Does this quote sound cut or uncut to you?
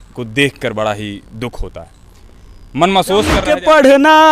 cut